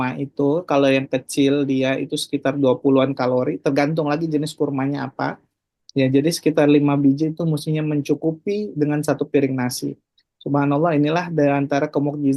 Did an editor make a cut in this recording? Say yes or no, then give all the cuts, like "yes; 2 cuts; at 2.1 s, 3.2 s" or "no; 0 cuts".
no; 0 cuts